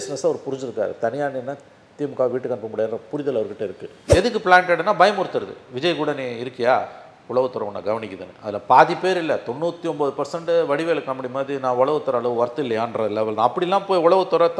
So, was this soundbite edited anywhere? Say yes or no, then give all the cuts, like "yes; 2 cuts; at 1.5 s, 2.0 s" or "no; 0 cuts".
yes; 1 cut; at 4.0 s